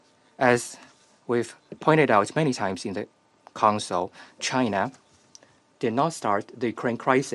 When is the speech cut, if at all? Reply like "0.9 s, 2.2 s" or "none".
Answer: none

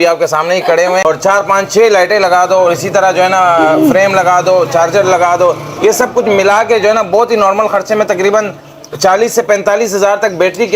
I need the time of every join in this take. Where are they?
1.0 s

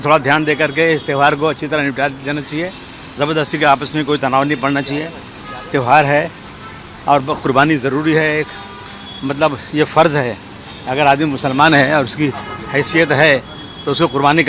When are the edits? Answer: none

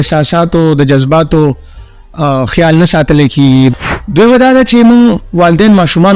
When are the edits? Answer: 3.7 s

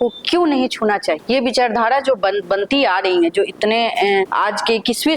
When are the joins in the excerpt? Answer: 1.2 s, 2.4 s, 4.3 s

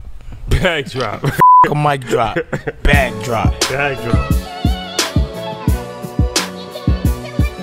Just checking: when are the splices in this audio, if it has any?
none

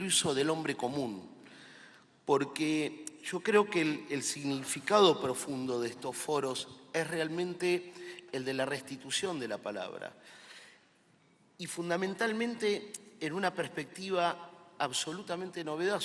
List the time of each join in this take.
10.1 s

